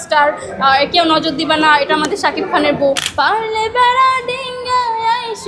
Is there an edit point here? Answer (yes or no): yes